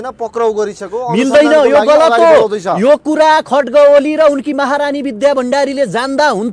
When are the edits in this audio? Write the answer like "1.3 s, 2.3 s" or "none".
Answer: none

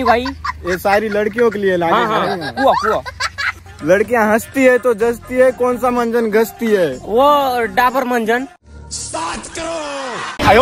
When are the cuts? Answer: none

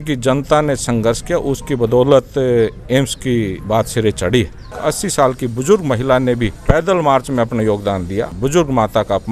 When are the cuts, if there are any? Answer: 3.6 s, 4.8 s, 6.5 s, 8.3 s

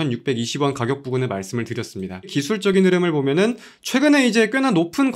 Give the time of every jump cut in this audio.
2.3 s

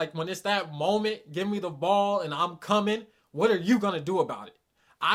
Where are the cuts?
none

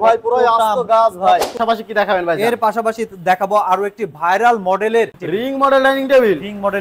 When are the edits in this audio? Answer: 1.6 s, 5.1 s

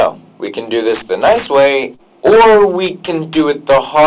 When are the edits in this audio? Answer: 1.9 s

